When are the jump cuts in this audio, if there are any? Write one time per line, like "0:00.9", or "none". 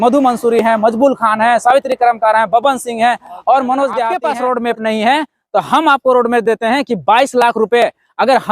0:04.2